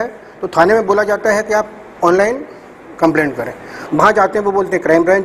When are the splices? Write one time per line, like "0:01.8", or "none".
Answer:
0:03.7